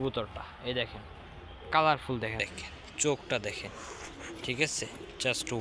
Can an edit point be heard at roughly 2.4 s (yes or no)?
yes